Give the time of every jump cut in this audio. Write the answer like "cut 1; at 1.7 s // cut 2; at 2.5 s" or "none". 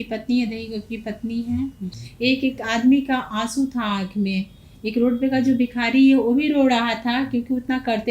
cut 1; at 1.9 s